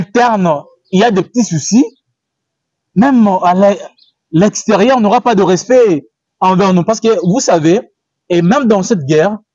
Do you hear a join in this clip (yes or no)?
no